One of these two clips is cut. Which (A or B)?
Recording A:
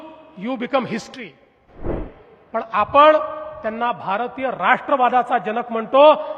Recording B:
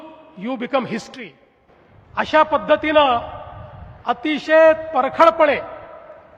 A